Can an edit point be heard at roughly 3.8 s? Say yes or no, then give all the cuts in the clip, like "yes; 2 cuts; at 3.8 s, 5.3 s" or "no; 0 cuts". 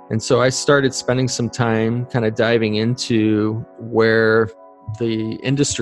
no; 0 cuts